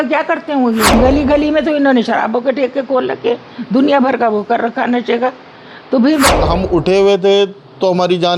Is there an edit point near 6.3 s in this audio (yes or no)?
yes